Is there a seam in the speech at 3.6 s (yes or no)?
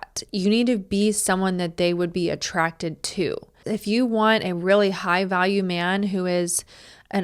yes